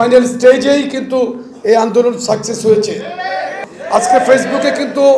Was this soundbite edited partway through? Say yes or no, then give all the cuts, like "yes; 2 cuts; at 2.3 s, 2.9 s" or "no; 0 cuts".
yes; 1 cut; at 3.6 s